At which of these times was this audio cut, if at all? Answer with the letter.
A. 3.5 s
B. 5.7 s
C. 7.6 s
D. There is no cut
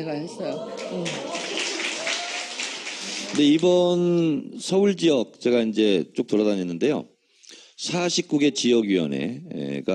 A